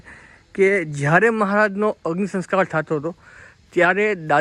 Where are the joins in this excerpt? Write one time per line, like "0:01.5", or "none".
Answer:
none